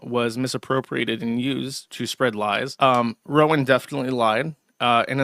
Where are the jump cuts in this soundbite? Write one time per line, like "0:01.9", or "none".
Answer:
0:02.7